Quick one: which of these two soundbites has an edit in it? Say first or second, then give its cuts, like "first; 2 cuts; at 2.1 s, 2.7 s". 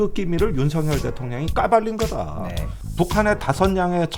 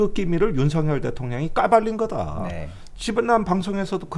first; 1 cut; at 2.8 s